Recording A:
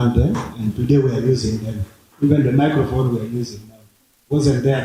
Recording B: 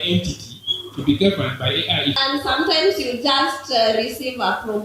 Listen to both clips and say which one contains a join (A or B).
B